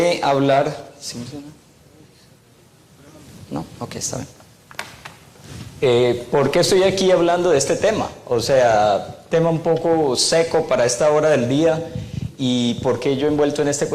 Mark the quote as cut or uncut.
cut